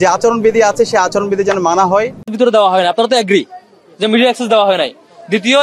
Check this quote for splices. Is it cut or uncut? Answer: cut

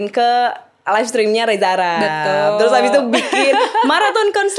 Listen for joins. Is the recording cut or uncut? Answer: uncut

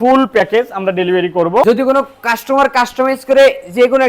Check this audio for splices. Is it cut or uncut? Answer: cut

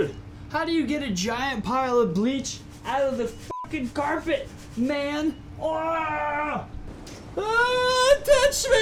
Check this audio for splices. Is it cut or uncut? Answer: uncut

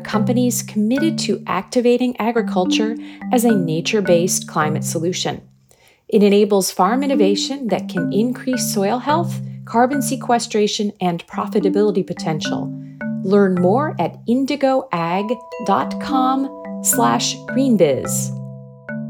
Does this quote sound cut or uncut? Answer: cut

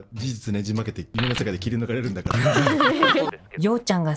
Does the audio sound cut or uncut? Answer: cut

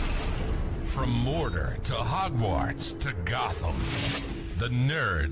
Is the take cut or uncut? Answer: uncut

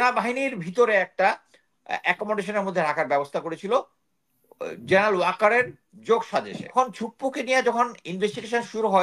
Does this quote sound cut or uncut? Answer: cut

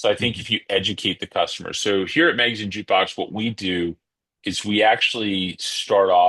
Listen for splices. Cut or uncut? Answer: uncut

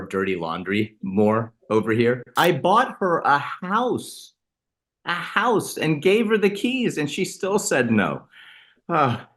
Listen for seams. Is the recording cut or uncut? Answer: cut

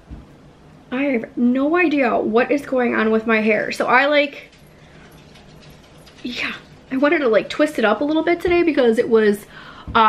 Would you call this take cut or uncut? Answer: uncut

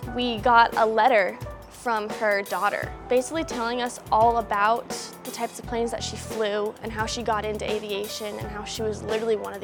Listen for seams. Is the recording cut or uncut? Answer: uncut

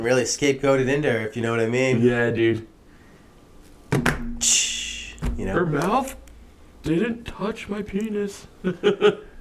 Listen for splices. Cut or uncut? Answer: uncut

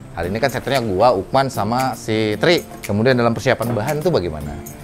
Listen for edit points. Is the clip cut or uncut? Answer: cut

